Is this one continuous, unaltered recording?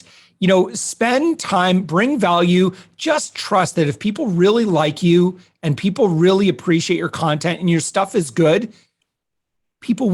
yes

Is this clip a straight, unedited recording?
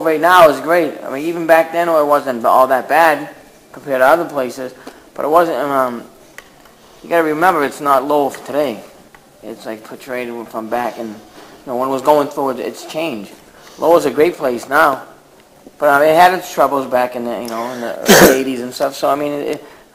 yes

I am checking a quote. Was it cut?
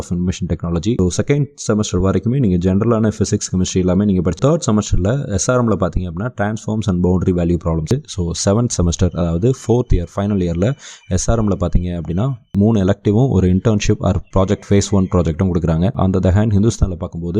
yes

